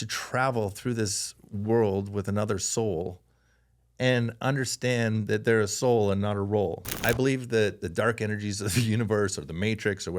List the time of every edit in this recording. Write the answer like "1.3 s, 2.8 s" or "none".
6.9 s